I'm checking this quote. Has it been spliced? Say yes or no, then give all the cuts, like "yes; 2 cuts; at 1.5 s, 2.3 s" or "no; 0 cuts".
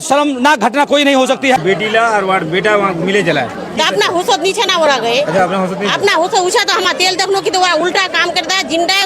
yes; 1 cut; at 1.6 s